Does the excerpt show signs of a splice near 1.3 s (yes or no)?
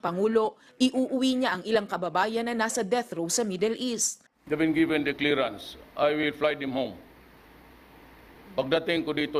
yes